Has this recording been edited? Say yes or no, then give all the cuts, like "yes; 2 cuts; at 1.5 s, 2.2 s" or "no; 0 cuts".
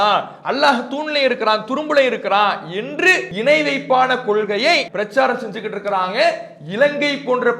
yes; 2 cuts; at 3.3 s, 4.9 s